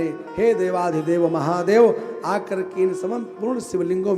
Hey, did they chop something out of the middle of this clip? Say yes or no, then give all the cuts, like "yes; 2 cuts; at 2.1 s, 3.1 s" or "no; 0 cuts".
no; 0 cuts